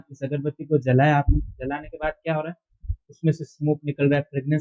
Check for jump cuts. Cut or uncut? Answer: uncut